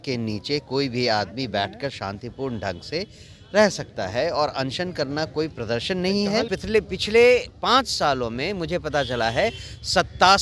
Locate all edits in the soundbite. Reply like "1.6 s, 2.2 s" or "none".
6.5 s